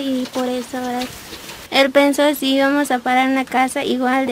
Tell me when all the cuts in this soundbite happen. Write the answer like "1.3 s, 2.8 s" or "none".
1.7 s